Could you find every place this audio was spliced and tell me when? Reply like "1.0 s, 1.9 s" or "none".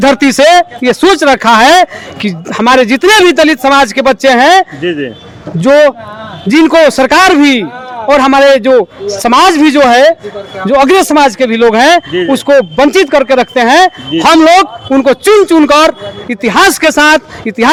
none